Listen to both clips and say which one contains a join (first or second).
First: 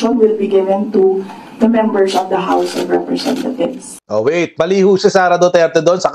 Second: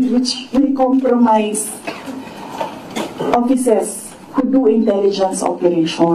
first